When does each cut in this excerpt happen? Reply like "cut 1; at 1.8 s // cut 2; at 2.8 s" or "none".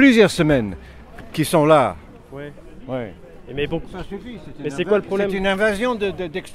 none